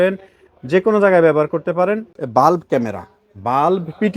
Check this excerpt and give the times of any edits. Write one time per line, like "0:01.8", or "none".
0:02.1